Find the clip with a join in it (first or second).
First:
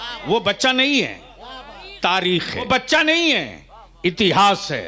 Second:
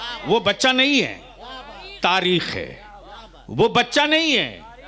first